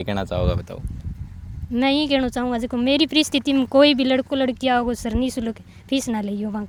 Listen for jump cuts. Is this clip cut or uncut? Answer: uncut